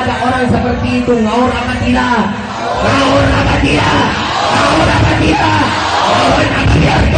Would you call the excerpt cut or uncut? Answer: uncut